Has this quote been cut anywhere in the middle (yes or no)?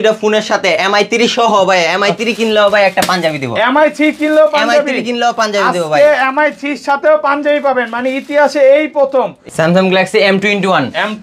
yes